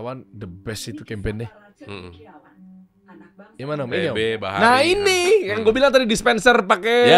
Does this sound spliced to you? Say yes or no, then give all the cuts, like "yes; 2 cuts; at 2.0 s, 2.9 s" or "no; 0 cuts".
no; 0 cuts